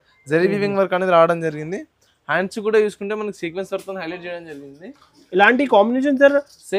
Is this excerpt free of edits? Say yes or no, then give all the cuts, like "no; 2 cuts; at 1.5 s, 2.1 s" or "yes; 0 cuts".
yes; 0 cuts